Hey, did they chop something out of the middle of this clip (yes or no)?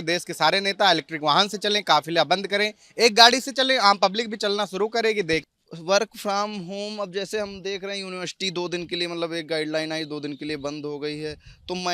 yes